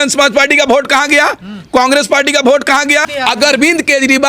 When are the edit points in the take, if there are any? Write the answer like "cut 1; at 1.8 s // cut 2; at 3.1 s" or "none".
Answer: cut 1; at 3.0 s